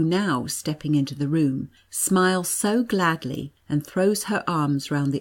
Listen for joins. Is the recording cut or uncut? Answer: uncut